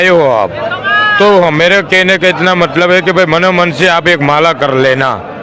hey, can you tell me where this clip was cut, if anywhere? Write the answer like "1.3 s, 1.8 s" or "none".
none